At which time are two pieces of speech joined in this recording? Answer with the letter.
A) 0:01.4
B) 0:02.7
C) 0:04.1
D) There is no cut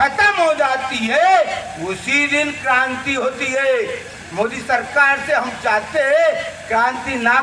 C